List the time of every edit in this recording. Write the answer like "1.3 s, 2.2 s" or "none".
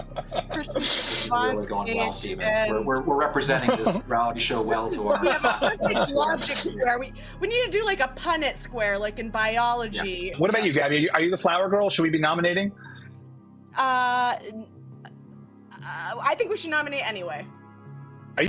10.3 s